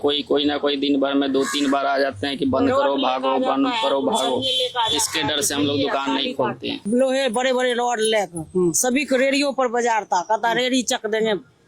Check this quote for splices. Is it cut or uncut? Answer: cut